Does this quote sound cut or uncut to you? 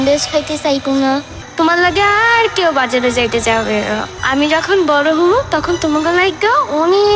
cut